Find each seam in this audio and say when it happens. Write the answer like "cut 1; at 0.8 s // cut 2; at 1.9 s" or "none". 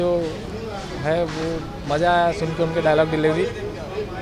none